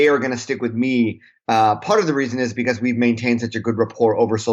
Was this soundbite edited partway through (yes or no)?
no